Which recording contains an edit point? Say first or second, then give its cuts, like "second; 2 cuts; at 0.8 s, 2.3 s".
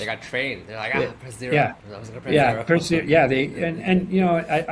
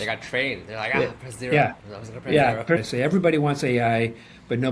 second; 1 cut; at 2.8 s